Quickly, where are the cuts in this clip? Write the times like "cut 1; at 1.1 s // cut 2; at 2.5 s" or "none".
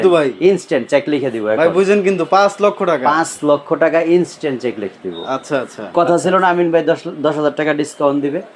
cut 1; at 5.9 s